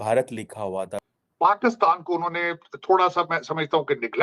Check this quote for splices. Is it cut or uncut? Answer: cut